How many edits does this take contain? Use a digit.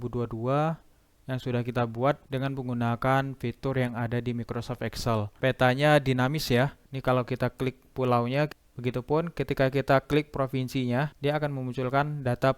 3